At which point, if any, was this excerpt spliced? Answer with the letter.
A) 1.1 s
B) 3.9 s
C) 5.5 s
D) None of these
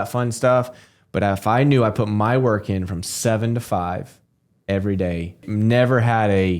C